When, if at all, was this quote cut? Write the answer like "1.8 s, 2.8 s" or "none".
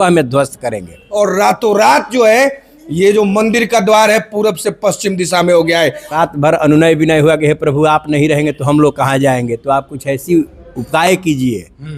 1.0 s, 6.1 s

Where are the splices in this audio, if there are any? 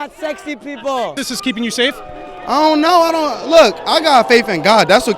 1.1 s

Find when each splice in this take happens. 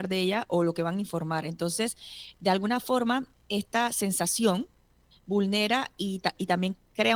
none

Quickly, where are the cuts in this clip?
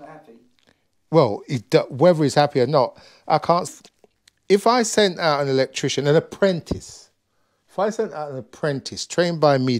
3.8 s

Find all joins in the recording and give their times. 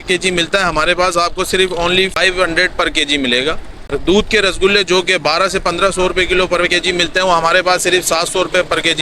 2.2 s, 3.7 s

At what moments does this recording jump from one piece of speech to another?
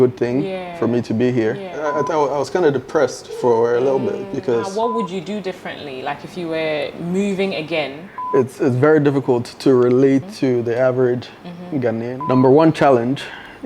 1.8 s, 4.7 s, 8.1 s, 12.2 s

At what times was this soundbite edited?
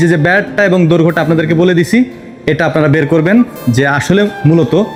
none

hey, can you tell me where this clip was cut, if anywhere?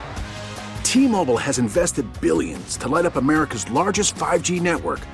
none

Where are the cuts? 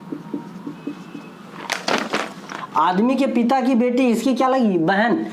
none

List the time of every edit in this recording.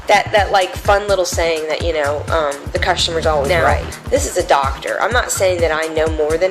3.5 s

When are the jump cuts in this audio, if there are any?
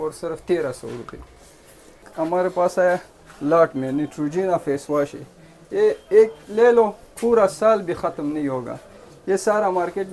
2.1 s

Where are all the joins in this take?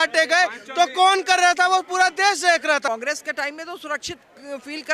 2.8 s

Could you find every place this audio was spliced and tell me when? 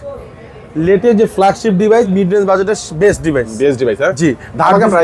none

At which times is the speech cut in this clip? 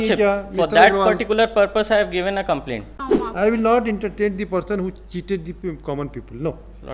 3.0 s

